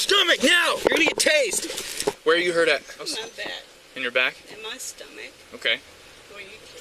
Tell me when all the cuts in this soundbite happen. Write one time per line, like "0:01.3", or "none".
0:02.1
0:03.1